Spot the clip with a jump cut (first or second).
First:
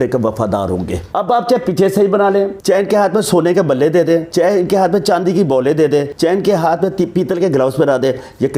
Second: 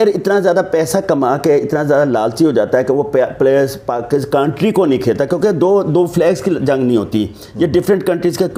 first